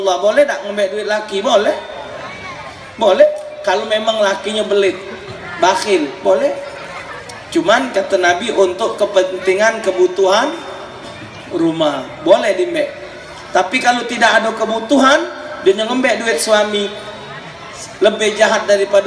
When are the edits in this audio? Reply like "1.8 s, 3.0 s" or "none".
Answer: none